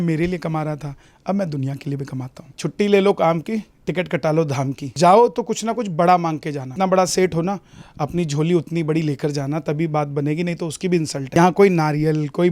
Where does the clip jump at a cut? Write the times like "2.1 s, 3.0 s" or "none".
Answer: 2.5 s, 4.9 s, 6.7 s, 11.4 s